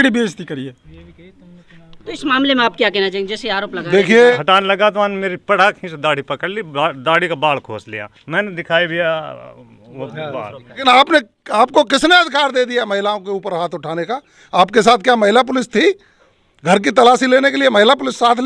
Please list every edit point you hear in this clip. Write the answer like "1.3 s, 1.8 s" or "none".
4.4 s, 10.8 s